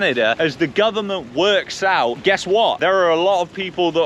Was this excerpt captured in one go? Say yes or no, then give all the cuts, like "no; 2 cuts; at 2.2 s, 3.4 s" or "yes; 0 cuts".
no; 1 cut; at 2.8 s